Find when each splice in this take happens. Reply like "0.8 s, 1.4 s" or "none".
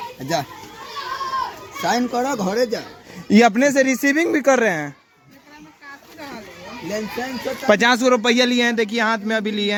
none